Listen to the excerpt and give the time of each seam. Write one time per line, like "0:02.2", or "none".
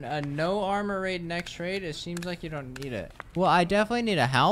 0:03.2